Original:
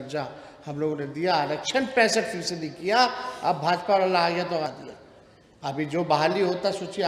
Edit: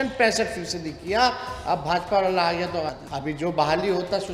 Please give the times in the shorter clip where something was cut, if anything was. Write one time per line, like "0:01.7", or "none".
0:03.0